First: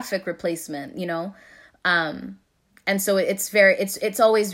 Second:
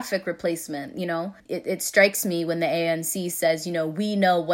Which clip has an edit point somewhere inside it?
second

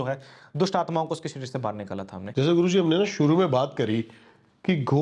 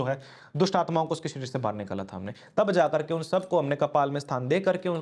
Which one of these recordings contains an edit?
first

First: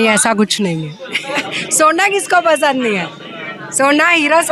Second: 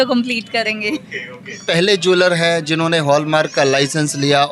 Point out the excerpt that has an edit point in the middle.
second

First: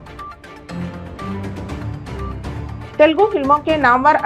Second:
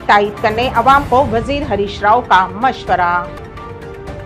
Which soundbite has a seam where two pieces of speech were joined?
first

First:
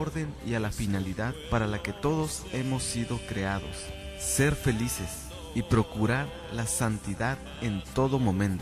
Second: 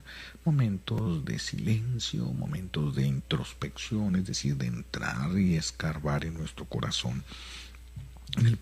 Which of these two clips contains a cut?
second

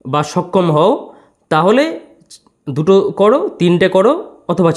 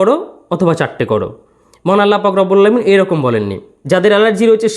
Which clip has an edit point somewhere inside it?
second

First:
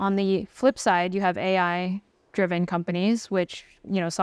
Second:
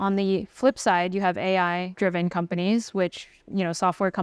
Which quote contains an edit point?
second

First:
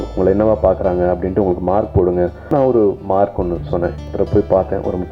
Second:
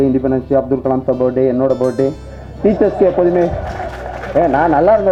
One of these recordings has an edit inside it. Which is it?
first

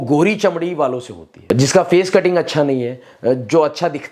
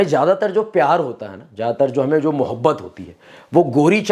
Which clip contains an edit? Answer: first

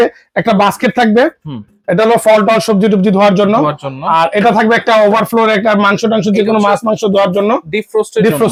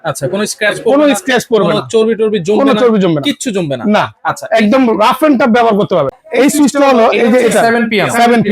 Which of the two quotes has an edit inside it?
second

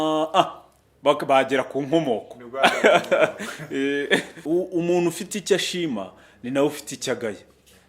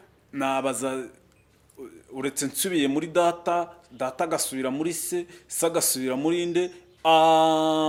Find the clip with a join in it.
first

